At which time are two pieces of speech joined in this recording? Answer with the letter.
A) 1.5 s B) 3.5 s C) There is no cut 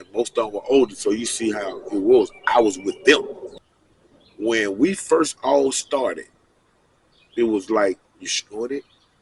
B